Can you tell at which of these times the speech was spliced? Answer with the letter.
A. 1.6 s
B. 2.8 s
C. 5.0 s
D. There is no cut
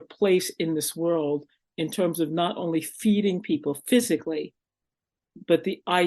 A